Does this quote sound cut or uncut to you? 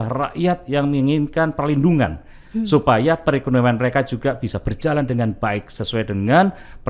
uncut